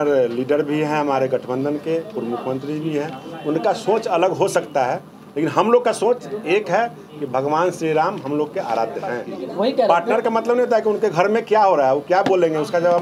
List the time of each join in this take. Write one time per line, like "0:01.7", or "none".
0:09.3